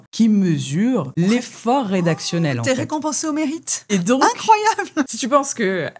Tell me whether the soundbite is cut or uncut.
cut